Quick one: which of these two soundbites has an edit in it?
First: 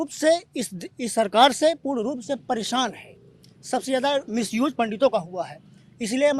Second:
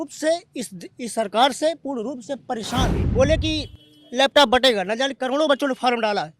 second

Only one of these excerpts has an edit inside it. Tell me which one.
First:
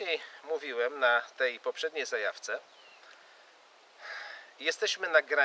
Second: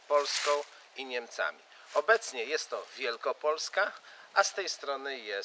first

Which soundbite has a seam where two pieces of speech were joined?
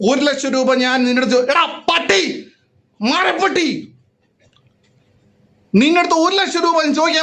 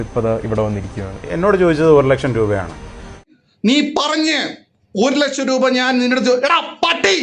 second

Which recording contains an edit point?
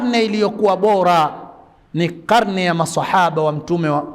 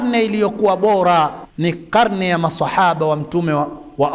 second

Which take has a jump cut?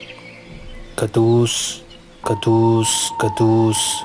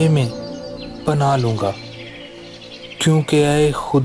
first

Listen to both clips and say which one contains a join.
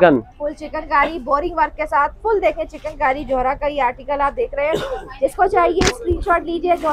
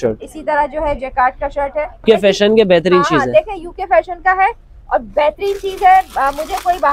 second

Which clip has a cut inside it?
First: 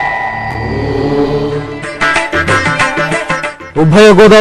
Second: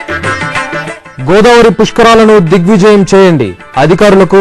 first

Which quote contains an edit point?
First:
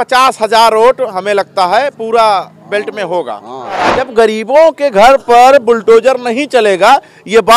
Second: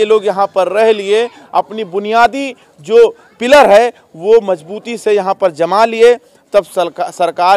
first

